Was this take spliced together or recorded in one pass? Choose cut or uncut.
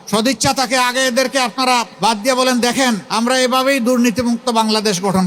cut